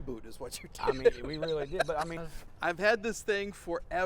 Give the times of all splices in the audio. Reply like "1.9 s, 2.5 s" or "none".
2.2 s

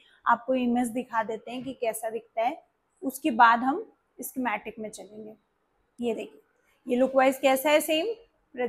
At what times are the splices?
none

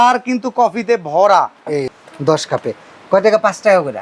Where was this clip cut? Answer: 2.0 s

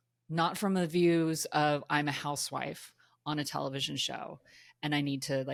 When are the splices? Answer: none

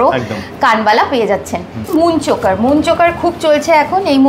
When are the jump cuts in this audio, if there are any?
1.8 s

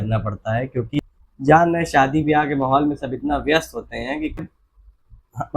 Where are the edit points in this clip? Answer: 1.0 s, 4.4 s

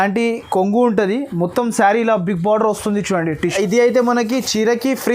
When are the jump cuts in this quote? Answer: 3.5 s

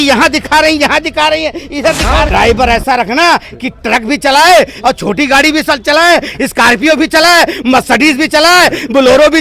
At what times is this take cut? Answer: 2.3 s

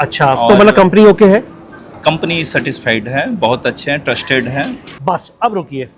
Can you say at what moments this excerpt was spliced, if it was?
4.8 s

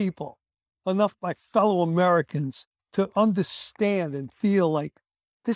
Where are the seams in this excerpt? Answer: 2.8 s

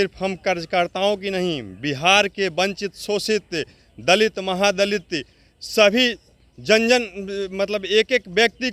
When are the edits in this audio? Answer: none

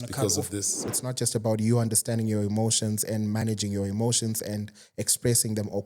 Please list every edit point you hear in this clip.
0.9 s

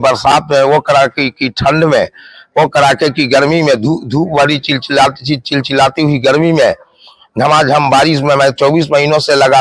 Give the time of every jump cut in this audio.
none

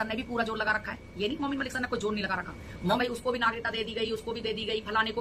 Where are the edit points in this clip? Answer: 3.0 s

